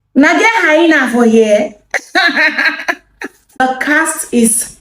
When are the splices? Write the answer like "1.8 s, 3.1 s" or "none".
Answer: 3.6 s